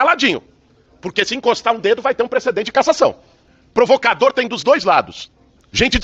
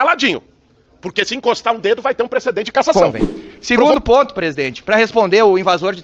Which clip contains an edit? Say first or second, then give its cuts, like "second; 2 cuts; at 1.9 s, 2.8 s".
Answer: second; 1 cut; at 2.9 s